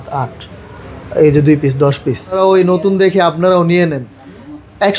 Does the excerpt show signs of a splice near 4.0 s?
no; 1 cut; at 2.3 s

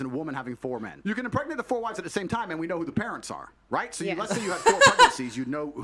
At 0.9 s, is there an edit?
yes; 1 cut; at 0.9 s

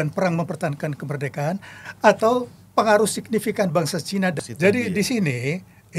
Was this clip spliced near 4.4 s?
yes; 1 cut; at 4.4 s

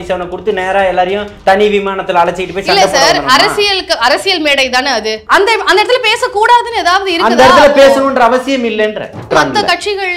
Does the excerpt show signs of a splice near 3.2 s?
no; 2 cuts; at 5.2 s, 9.3 s

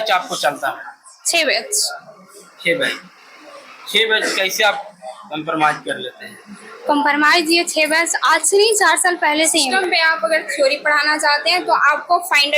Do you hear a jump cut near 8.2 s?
no; 1 cut; at 9.7 s

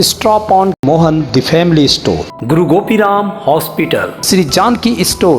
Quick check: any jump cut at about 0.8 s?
yes; 2 cuts; at 0.8 s, 4.2 s

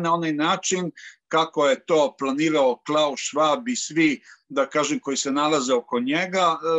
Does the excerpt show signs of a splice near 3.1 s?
no; 0 cuts

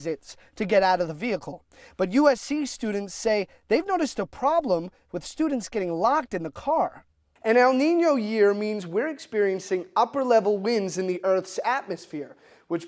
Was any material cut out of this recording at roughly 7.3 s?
yes; 1 cut; at 7.3 s

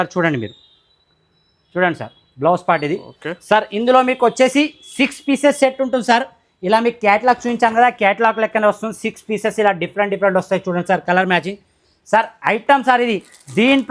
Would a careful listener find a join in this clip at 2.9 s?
no; 0 cuts

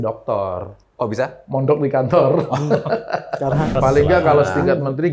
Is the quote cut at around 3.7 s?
yes; 1 cut; at 3.7 s

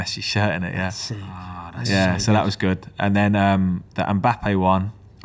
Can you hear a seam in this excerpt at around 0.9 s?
no; 0 cuts

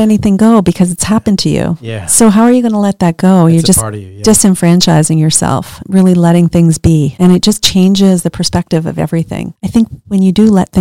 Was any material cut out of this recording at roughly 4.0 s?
no; 1 cut; at 9.5 s

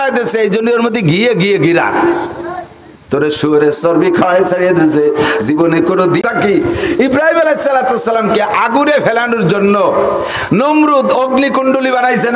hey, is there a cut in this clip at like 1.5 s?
no; 1 cut; at 6.2 s

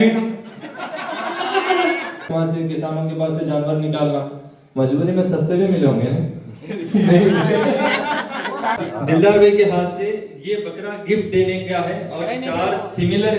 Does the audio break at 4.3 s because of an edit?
no; 2 cuts; at 2.3 s, 8.8 s

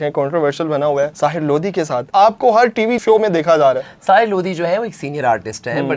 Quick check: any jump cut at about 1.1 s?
no; 0 cuts

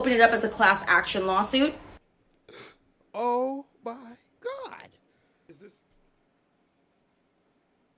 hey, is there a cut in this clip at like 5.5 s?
yes; 1 cut; at 5.5 s

